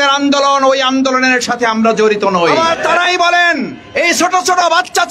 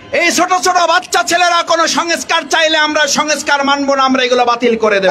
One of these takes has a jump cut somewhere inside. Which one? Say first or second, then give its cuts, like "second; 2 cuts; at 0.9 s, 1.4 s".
first; 1 cut; at 2.5 s